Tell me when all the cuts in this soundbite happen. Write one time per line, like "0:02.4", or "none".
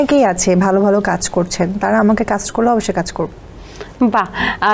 none